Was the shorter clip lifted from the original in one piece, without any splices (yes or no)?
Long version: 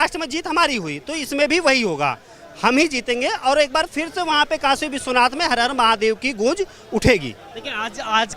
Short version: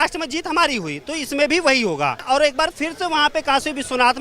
no